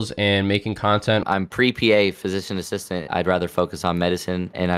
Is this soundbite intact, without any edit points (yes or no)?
no